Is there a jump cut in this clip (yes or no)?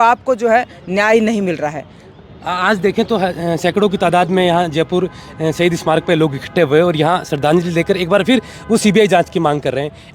no